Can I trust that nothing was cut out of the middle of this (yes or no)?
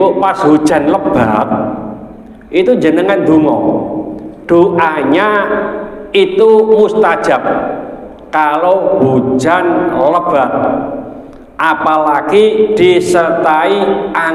yes